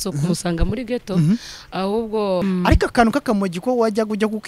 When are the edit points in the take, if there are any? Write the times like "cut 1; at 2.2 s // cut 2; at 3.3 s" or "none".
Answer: cut 1; at 2.4 s